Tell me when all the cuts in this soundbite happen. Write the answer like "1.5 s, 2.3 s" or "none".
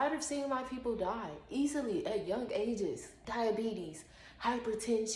3.1 s